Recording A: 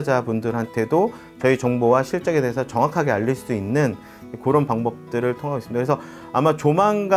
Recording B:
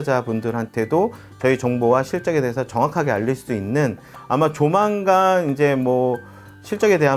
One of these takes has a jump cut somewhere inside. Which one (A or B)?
B